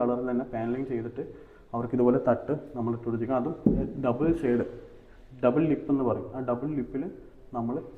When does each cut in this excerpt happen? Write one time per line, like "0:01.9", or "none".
none

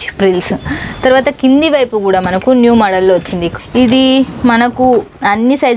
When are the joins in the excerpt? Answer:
0:03.5

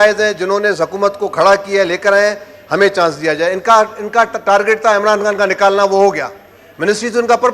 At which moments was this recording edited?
none

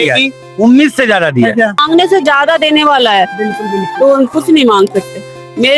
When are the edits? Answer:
0:01.8

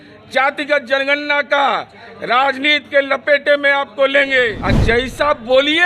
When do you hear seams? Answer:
0:04.6

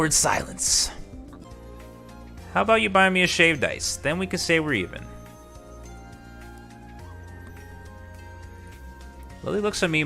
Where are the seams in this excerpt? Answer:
0:01.5

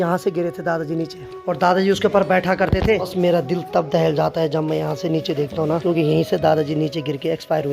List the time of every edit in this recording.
0:01.3
0:03.1
0:05.8

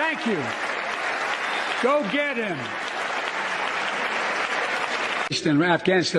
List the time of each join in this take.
0:05.3

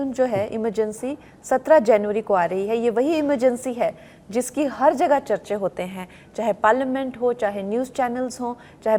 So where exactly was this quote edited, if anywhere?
none

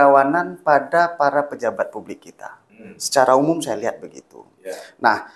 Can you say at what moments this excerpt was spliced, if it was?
none

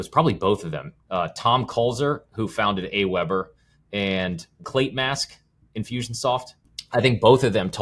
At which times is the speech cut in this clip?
0:04.6
0:06.6

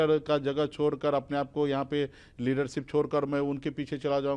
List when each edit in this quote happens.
none

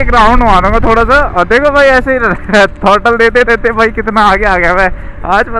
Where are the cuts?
none

